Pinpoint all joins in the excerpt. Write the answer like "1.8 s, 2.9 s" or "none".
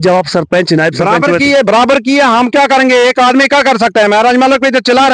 none

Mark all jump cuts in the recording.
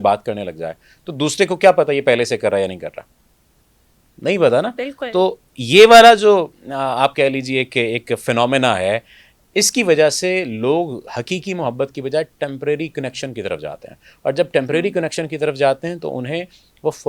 none

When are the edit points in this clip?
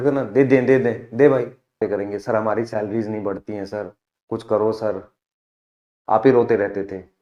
1.8 s

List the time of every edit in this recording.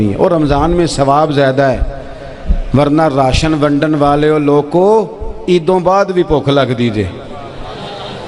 none

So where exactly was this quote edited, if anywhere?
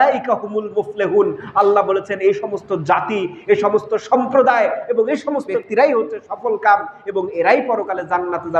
5.6 s

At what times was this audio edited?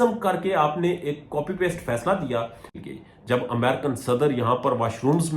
2.8 s

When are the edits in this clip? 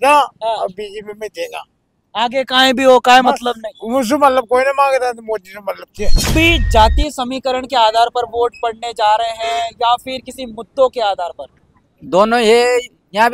6.3 s

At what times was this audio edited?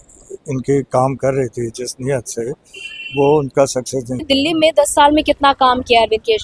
4.2 s

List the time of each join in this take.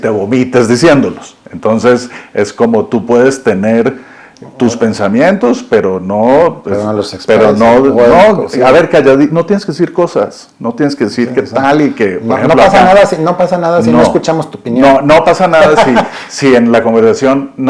none

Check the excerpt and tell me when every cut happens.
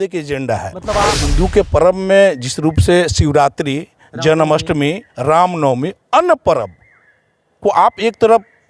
1.1 s

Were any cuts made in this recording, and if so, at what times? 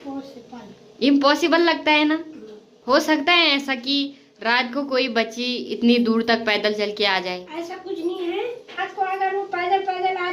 none

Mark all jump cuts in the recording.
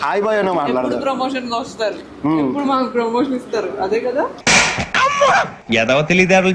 4.4 s

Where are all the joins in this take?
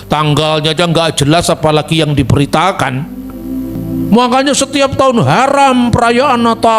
3.7 s

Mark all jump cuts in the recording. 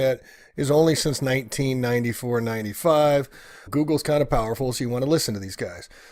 none

